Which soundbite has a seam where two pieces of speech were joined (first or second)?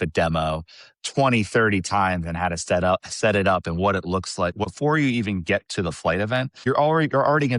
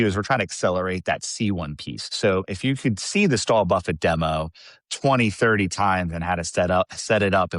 first